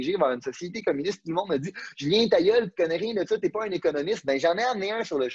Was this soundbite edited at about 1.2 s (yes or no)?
no